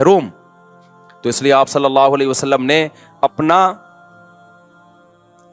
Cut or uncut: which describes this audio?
uncut